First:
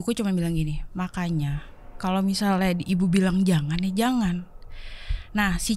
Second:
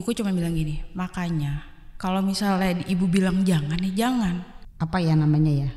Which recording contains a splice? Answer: second; 1 cut; at 4.6 s

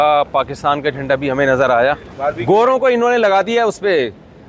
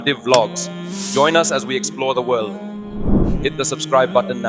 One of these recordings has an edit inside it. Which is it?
first; 1 cut; at 2.1 s

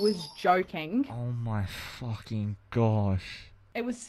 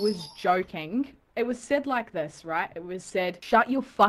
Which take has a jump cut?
second; 1 cut; at 1.2 s

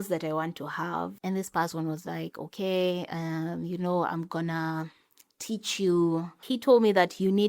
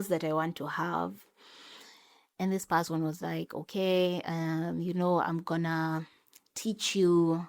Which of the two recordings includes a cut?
first; 2 cuts; at 1.2 s, 6.3 s

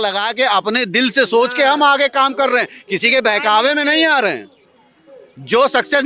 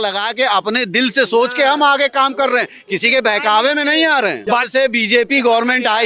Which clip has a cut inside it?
second; 1 cut; at 4.4 s

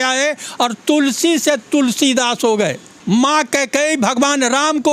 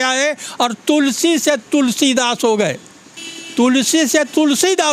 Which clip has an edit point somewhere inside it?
first; 1 cut; at 2.9 s

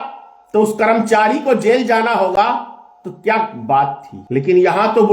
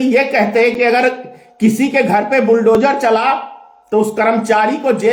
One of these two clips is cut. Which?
first; 1 cut; at 4.1 s

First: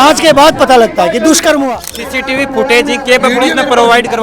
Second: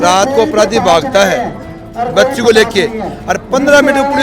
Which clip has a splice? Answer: first; 1 cut; at 2.1 s

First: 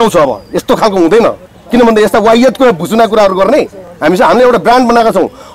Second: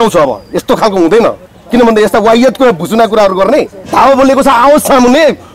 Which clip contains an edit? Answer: second; 1 cut; at 3.8 s

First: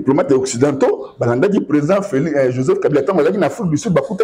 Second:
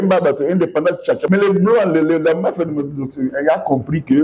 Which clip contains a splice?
second; 1 cut; at 1.2 s

